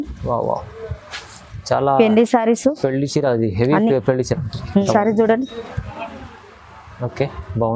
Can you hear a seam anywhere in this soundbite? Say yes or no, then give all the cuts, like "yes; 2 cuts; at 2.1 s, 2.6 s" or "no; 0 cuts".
yes; 1 cut; at 4.8 s